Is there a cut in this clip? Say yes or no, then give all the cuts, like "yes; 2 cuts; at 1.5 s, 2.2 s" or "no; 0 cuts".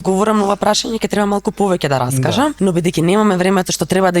yes; 1 cut; at 2.5 s